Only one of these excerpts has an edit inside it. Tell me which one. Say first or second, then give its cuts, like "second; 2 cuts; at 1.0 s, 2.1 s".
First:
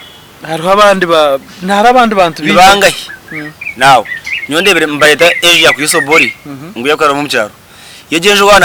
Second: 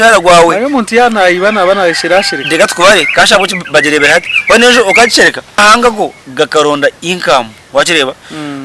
second; 1 cut; at 5.6 s